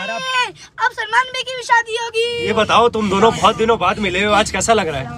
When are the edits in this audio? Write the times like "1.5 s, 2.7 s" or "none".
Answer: 2.4 s